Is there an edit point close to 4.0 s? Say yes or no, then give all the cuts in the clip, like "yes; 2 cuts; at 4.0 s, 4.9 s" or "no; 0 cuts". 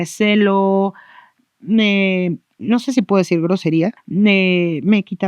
yes; 1 cut; at 4.0 s